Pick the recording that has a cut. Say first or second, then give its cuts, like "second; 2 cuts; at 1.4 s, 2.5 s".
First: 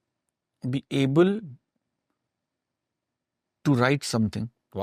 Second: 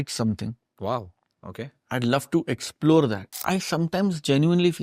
second; 1 cut; at 3.3 s